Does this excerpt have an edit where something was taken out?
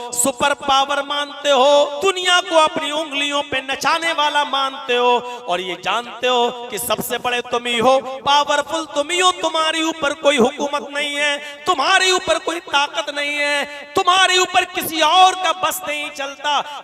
yes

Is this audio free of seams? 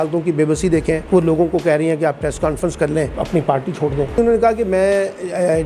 no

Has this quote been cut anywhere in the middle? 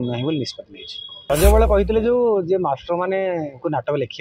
yes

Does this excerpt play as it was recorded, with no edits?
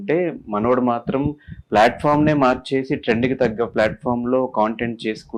yes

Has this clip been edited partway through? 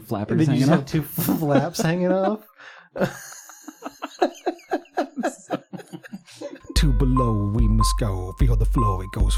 yes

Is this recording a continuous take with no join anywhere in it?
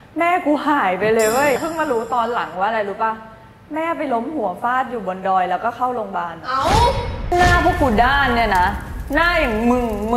no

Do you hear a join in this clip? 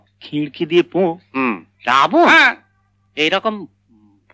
yes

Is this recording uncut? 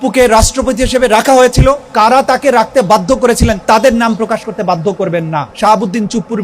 no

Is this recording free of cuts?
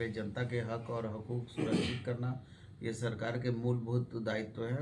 yes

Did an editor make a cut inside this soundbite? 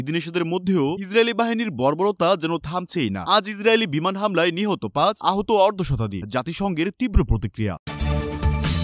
no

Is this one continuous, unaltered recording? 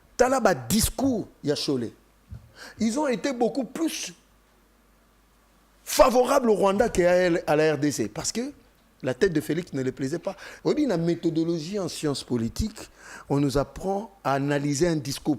no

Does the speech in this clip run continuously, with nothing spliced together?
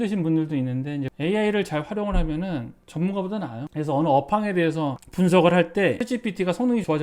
no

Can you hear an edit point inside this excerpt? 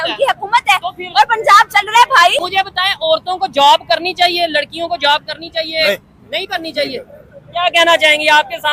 yes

